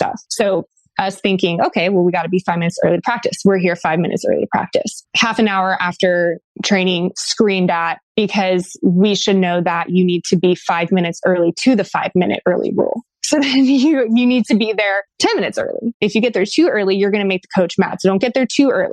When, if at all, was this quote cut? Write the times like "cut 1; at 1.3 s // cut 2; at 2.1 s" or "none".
none